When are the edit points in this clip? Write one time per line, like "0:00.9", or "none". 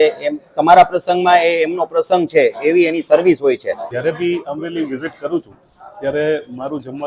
0:03.8